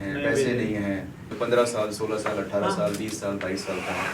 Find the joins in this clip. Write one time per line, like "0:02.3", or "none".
0:01.3